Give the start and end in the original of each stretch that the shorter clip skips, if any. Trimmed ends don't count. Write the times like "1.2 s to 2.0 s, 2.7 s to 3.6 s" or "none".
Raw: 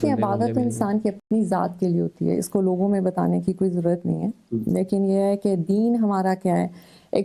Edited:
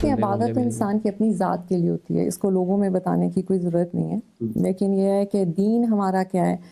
1.1 s to 1.3 s